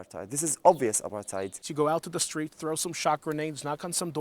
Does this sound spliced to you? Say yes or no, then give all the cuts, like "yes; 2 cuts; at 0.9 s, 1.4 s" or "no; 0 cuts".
yes; 1 cut; at 1.6 s